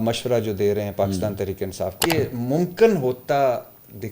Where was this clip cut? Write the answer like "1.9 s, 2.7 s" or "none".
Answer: 2.0 s